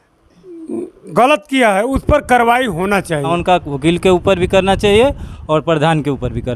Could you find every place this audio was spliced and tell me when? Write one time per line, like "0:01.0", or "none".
0:03.4